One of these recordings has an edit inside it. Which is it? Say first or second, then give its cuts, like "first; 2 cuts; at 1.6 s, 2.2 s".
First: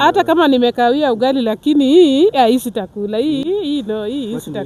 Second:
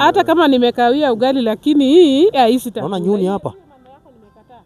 second; 1 cut; at 2.8 s